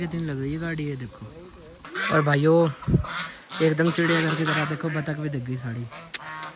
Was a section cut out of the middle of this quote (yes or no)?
yes